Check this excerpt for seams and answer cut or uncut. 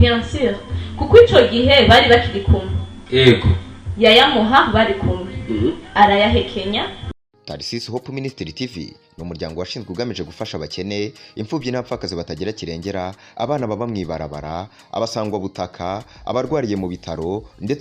cut